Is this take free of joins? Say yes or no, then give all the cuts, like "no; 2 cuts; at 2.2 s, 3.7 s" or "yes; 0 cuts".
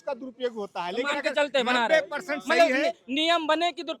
yes; 0 cuts